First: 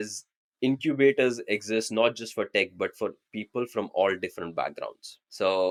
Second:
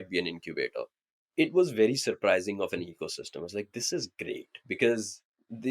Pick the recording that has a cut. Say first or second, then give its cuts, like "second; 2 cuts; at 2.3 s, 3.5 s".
second; 1 cut; at 1.2 s